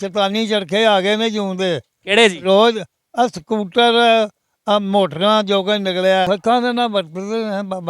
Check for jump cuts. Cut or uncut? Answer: cut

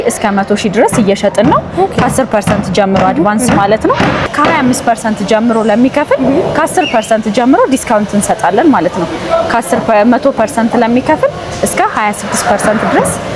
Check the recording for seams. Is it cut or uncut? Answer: cut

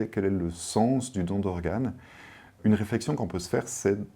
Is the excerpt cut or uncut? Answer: cut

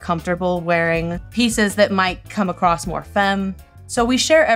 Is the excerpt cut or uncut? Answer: cut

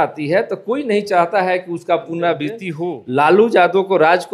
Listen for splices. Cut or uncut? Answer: cut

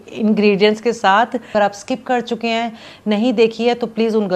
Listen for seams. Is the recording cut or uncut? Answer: cut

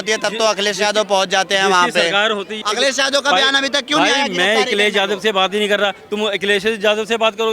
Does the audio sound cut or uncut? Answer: cut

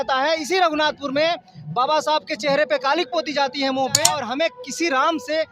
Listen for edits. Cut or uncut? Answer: cut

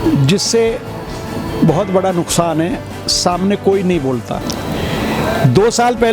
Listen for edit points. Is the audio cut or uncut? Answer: cut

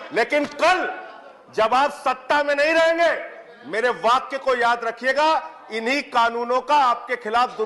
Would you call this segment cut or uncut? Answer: uncut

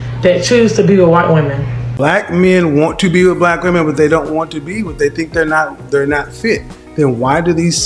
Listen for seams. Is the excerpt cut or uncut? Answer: cut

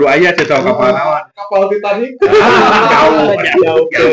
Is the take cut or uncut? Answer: uncut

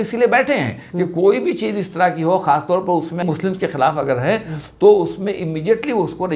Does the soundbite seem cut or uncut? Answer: cut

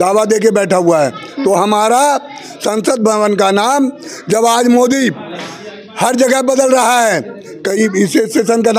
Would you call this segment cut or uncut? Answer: uncut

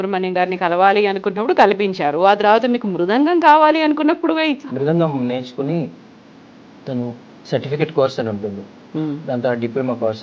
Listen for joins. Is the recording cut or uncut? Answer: cut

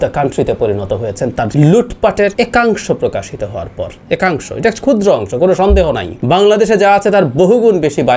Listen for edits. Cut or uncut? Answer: cut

